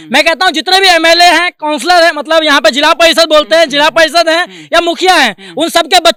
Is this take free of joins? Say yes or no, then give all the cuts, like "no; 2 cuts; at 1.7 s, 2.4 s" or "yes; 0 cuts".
yes; 0 cuts